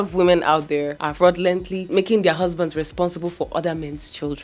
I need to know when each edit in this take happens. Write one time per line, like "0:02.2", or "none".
0:01.8

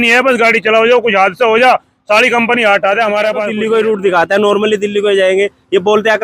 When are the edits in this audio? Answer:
0:03.5

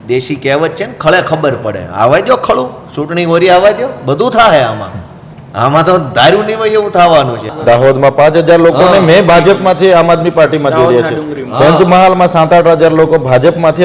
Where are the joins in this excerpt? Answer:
0:07.4

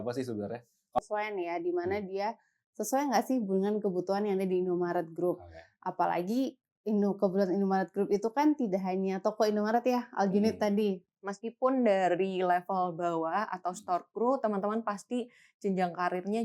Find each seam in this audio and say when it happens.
0:01.0
0:11.1

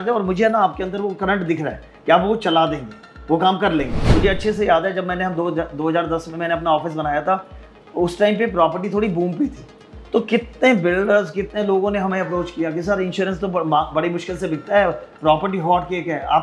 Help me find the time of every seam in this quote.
0:04.1

